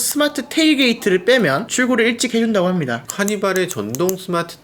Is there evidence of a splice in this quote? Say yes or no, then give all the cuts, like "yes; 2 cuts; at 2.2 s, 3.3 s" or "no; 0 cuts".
yes; 2 cuts; at 1.7 s, 3.1 s